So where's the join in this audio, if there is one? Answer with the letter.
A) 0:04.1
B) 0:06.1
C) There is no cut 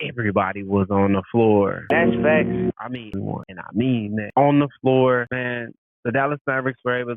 C